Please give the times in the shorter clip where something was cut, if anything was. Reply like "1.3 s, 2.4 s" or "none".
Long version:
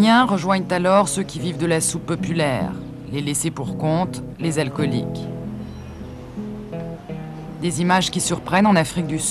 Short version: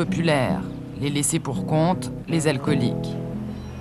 none